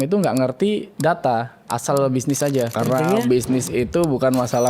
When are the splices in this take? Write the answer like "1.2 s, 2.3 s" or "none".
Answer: 0.9 s, 2.8 s